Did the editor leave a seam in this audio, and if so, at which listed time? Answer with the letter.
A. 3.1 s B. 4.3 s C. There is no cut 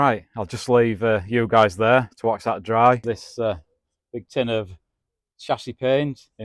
A